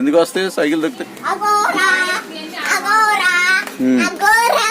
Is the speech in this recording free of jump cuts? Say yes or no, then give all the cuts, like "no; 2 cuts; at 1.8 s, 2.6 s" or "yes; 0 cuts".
no; 1 cut; at 1.0 s